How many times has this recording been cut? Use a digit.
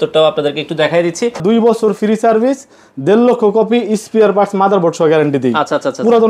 1